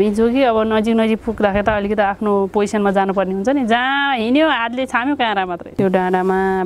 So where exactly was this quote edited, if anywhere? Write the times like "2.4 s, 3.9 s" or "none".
5.6 s